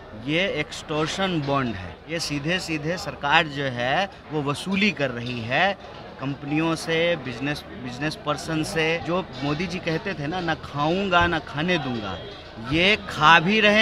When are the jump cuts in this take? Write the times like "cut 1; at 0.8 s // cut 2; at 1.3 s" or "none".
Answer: cut 1; at 1.9 s // cut 2; at 9.0 s